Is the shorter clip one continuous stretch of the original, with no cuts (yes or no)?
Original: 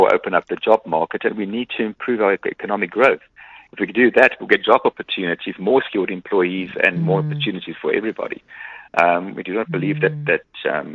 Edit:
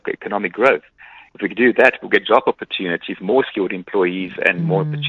yes